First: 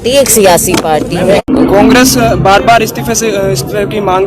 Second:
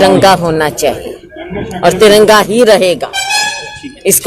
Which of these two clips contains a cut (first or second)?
first